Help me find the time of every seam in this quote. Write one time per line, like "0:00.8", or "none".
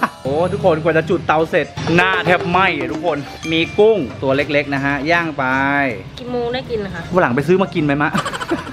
none